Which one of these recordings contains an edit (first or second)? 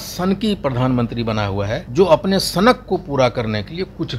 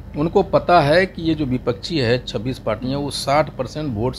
first